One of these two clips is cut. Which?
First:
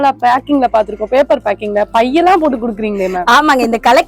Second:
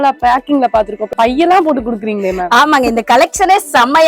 second; 1 cut; at 1.1 s

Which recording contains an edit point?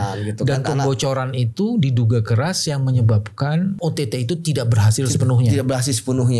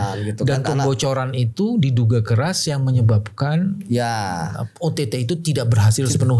first; 1 cut; at 3.8 s

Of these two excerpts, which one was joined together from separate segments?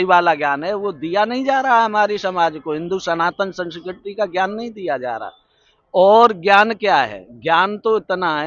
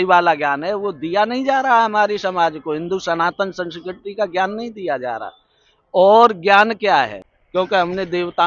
second; 1 cut; at 7.3 s

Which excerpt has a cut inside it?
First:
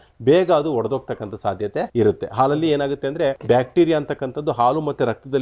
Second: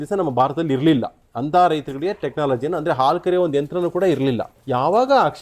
first; 2 cuts; at 1.9 s, 3.4 s

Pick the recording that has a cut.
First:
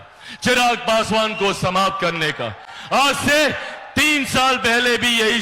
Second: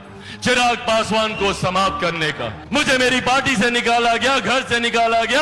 second; 1 cut; at 2.5 s

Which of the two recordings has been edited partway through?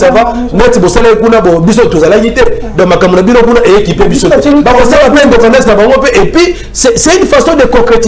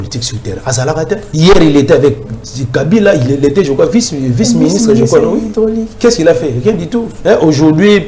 second; 2 cuts; at 1.3 s, 7.1 s

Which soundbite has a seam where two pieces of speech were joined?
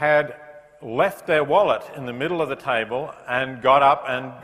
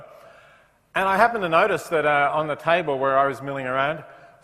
second; 1 cut; at 2.5 s

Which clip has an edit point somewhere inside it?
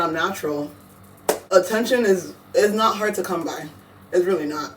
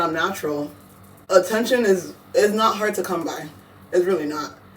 second; 1 cut; at 1.2 s

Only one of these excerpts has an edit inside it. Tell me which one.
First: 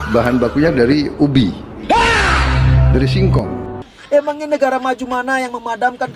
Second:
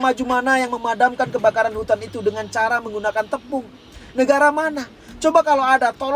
first; 1 cut; at 3.7 s

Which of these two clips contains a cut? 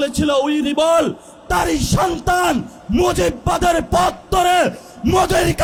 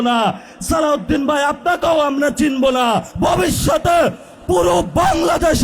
second; 1 cut; at 3.1 s

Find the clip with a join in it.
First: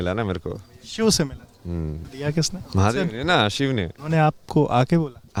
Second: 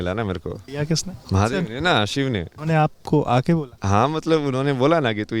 second; 2 cuts; at 1.0 s, 3.7 s

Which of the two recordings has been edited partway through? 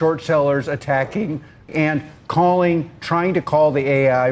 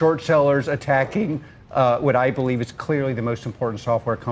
first; 1 cut; at 1.7 s

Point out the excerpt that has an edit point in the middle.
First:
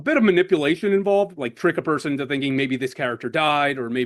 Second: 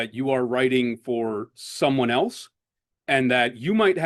first; 1 cut; at 1.3 s

